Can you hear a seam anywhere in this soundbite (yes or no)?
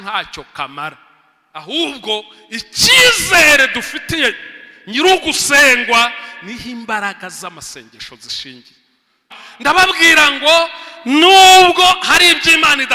yes